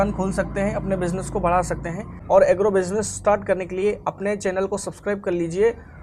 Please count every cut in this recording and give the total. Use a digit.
1